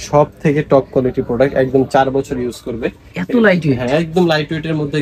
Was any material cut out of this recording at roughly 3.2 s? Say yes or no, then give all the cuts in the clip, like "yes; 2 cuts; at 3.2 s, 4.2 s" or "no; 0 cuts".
no; 0 cuts